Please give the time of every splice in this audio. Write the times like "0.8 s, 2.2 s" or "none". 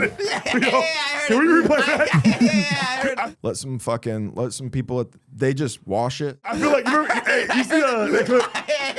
3.2 s, 6.5 s

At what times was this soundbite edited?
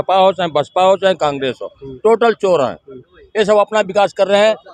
none

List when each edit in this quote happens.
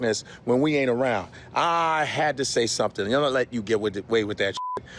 none

